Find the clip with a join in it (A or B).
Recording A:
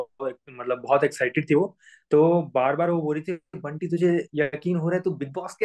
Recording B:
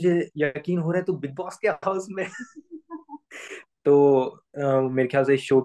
B